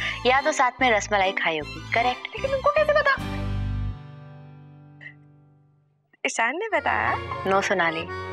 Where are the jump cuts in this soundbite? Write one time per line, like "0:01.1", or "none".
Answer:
0:02.3
0:07.3